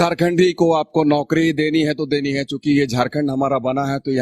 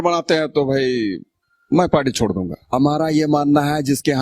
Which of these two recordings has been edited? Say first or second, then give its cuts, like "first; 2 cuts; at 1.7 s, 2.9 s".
second; 1 cut; at 2.7 s